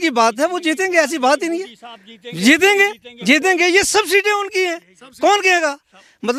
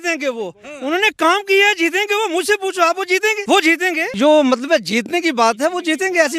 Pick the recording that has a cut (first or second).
second